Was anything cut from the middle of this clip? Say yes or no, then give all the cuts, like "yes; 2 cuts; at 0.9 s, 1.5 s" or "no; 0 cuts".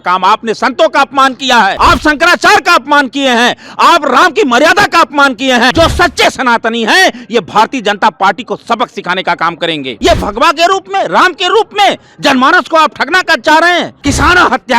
yes; 4 cuts; at 1.8 s, 5.7 s, 9.9 s, 13.9 s